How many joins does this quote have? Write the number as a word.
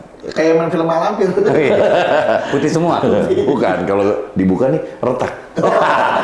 zero